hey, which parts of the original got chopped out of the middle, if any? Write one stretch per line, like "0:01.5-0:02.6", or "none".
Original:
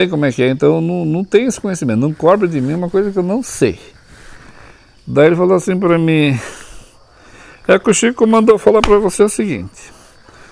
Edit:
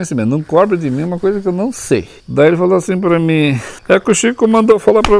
0:03.9-0:05.0
0:06.5-0:07.5